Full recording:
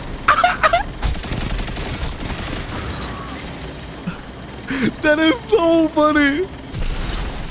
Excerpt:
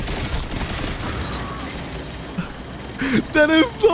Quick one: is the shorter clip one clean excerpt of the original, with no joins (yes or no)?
yes